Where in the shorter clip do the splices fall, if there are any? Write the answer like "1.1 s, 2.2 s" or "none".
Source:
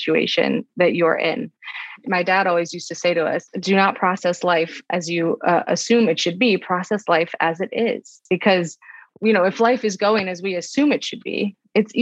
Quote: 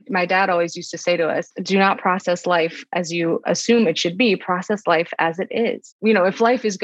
3.4 s, 5.9 s